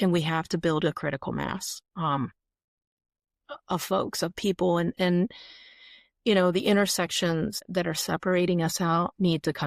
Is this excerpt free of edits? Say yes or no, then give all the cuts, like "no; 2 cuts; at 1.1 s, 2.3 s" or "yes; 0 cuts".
no; 1 cut; at 7.6 s